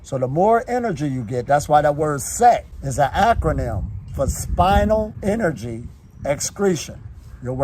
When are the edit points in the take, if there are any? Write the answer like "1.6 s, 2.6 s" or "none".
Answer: 2.8 s, 5.1 s